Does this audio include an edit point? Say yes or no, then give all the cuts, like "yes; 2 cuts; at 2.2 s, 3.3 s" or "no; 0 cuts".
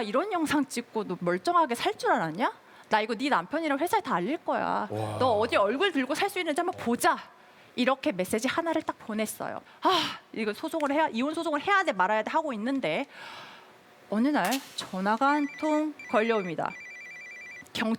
no; 0 cuts